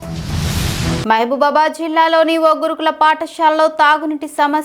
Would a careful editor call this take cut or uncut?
uncut